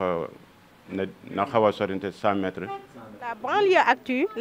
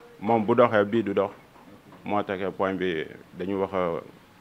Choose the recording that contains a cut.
first; 1 cut; at 3.4 s

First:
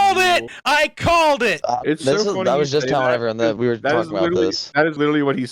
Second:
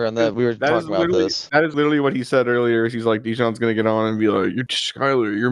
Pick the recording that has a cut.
first; 1 cut; at 1.6 s

